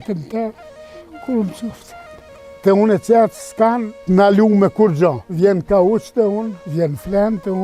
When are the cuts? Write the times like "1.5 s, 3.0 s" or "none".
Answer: 2.5 s, 3.9 s, 5.2 s, 6.6 s